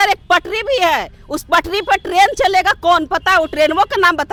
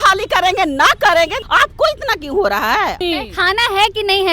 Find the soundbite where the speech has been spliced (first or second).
second